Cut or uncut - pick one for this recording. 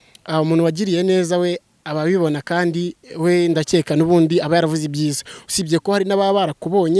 uncut